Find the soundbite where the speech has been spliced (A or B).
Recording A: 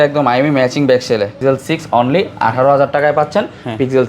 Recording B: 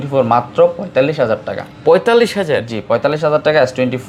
A